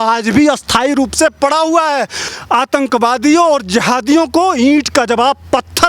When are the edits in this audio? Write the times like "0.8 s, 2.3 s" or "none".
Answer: 2.3 s